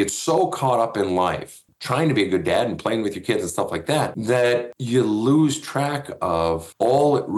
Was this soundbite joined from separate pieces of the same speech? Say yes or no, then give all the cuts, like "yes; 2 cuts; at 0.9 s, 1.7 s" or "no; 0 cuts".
yes; 1 cut; at 1.6 s